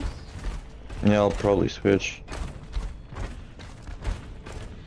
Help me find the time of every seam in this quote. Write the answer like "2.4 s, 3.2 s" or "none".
2.6 s